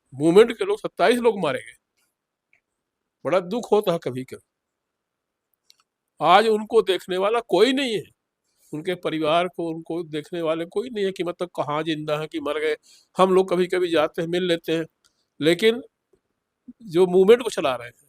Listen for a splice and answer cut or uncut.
uncut